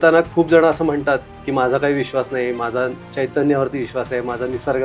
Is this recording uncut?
yes; 0 cuts

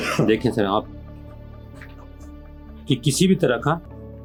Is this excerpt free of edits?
yes; 0 cuts

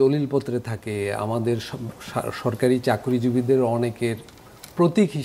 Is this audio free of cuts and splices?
yes; 0 cuts

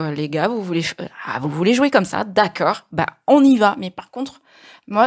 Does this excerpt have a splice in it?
no; 0 cuts

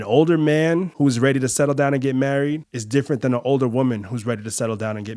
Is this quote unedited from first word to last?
no; 2 cuts; at 0.9 s, 2.7 s

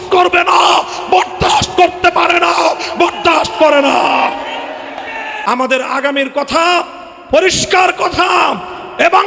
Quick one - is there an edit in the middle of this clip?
yes; 1 cut; at 5.3 s

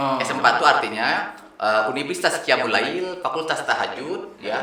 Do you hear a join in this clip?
no; 0 cuts

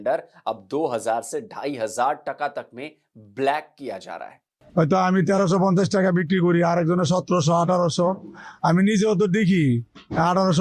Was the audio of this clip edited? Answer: no; 0 cuts

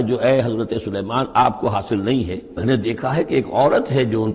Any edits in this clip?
yes; 1 cut; at 2.6 s

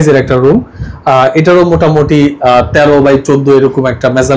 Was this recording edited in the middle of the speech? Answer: no; 0 cuts

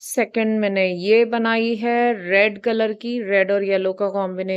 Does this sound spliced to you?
no; 0 cuts

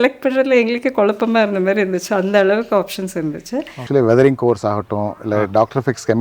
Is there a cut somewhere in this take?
yes; 1 cut; at 3.8 s

